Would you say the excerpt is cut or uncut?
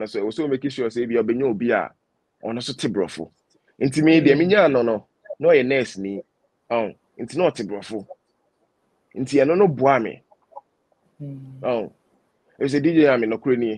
uncut